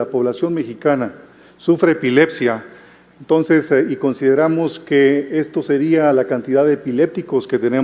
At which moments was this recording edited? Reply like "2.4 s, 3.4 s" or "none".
3.9 s

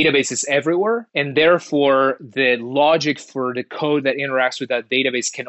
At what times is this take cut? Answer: 1.1 s

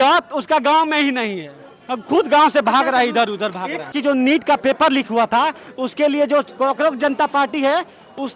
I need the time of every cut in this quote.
4.0 s

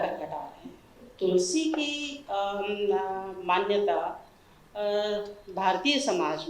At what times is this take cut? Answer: 1.1 s

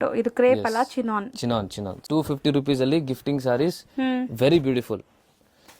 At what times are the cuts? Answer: 2.0 s

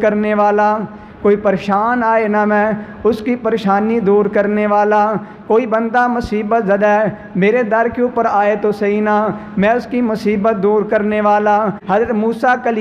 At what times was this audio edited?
11.8 s

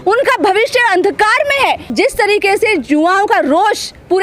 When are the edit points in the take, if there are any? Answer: 1.9 s

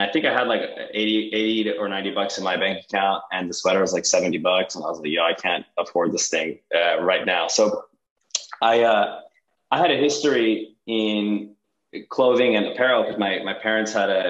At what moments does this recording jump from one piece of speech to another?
none

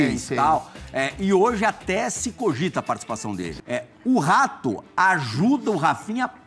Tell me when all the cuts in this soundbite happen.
3.5 s

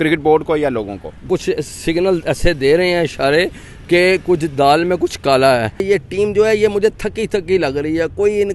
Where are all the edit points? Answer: 1.3 s, 5.8 s

